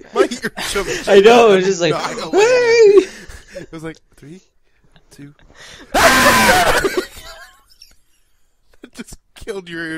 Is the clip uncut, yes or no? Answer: yes